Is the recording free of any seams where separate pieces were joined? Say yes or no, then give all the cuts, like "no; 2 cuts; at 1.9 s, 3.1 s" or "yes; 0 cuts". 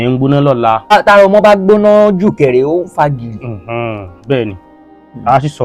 no; 1 cut; at 0.9 s